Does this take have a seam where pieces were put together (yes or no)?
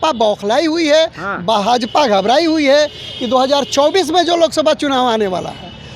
no